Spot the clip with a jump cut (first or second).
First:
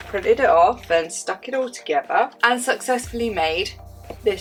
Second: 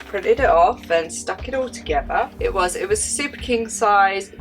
second